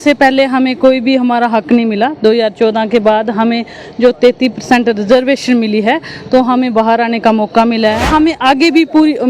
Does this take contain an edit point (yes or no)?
yes